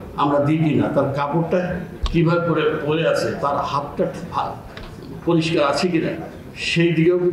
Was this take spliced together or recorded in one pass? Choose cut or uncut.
uncut